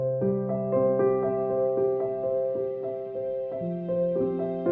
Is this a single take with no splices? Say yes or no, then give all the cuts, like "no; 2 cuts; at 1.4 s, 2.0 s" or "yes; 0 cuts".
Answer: yes; 0 cuts